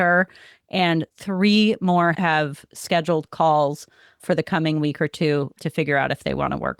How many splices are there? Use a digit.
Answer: 1